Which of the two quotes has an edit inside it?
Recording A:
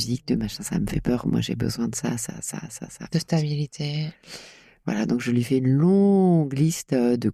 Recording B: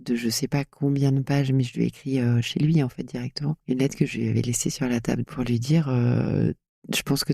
B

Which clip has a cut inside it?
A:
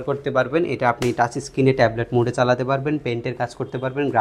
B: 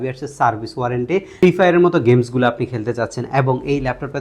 B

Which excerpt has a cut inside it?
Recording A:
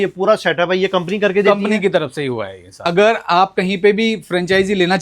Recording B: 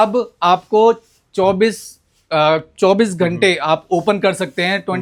A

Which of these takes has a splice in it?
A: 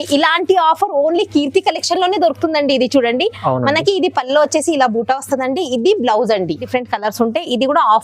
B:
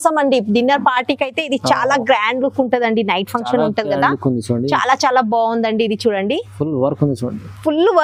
A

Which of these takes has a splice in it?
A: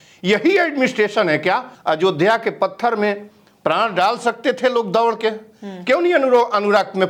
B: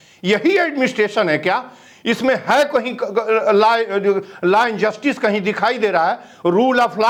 A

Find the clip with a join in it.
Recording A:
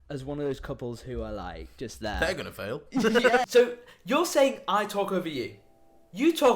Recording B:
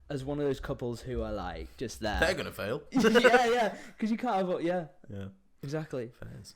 A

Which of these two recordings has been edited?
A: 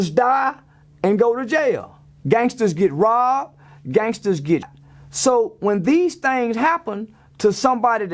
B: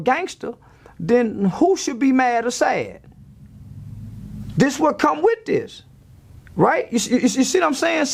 A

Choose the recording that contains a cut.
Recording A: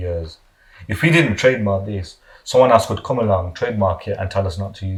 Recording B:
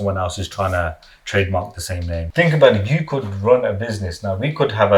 B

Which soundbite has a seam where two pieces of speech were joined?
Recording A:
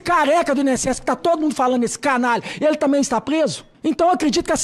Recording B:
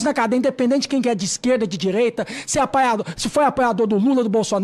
A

